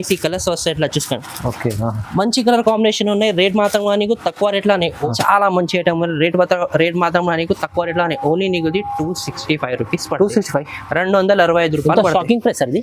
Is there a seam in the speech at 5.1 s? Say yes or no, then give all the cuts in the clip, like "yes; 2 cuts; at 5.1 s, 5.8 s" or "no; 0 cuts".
yes; 1 cut; at 5.1 s